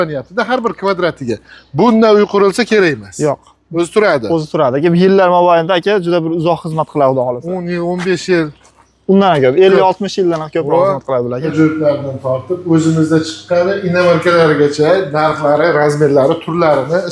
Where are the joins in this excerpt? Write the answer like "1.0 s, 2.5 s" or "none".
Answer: 11.5 s